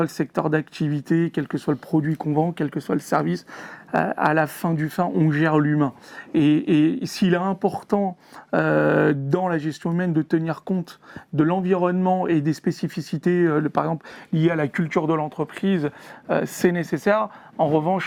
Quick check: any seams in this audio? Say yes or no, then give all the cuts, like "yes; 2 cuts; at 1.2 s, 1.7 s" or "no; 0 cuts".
no; 0 cuts